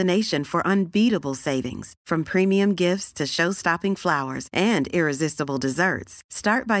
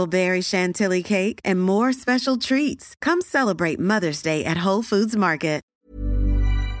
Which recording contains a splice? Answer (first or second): second